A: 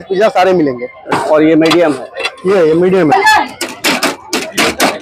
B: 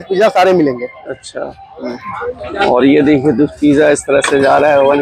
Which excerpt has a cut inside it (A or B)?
A